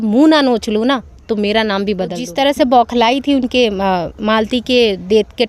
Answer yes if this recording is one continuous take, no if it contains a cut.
no